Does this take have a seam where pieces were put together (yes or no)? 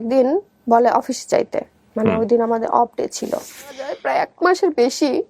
yes